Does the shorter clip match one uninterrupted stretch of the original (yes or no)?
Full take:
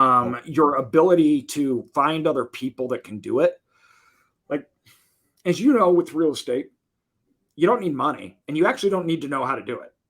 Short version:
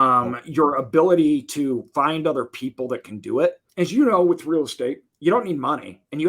no